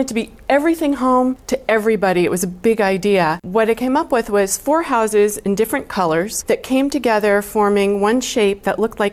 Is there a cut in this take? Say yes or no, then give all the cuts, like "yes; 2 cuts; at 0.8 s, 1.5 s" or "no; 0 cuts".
yes; 3 cuts; at 1.5 s, 3.4 s, 6.3 s